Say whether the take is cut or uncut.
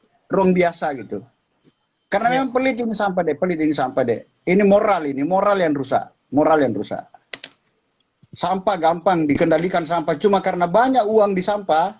cut